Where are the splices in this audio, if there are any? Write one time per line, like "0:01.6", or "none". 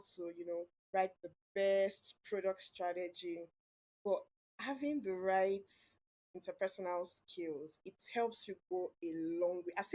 0:06.3